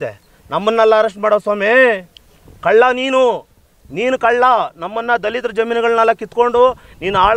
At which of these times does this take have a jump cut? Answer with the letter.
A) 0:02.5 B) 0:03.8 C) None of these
C